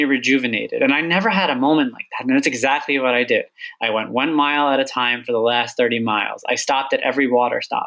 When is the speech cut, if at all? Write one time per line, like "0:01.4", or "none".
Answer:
none